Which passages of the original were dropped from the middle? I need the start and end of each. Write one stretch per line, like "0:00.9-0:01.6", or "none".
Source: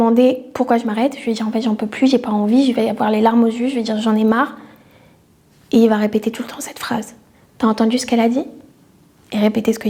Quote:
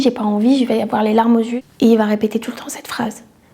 0:03.6-0:05.5